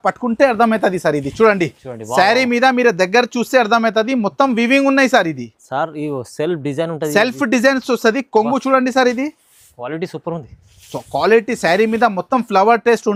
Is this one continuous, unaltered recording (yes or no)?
yes